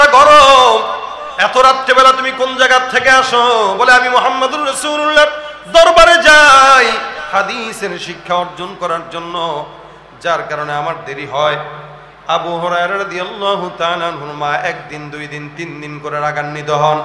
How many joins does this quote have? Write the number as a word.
zero